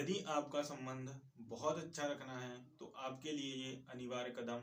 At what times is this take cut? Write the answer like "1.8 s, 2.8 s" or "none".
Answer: none